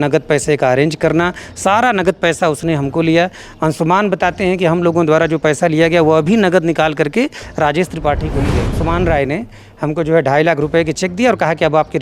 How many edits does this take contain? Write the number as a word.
one